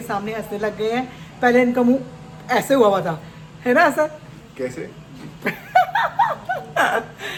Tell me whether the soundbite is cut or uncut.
uncut